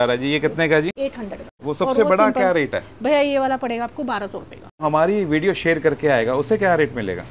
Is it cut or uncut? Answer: cut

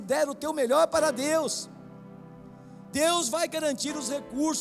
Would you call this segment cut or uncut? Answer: uncut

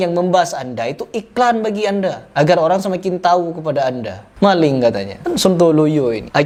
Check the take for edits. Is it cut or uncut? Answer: uncut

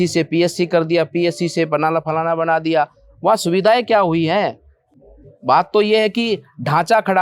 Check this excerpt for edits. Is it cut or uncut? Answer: uncut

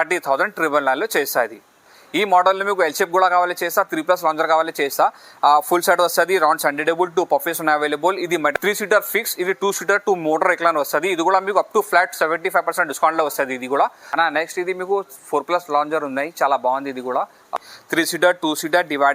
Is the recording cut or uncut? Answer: cut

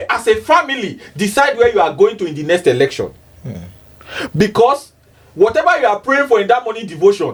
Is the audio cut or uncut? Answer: uncut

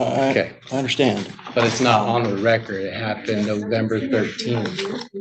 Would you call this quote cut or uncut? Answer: uncut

